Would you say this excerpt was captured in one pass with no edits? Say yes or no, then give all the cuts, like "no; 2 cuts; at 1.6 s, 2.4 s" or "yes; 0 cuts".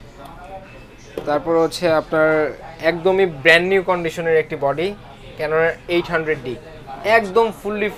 yes; 0 cuts